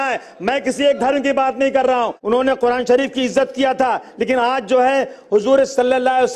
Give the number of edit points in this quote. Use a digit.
1